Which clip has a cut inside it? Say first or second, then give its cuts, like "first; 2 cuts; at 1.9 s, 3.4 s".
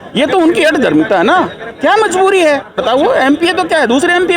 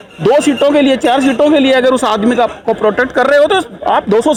first; 1 cut; at 2.8 s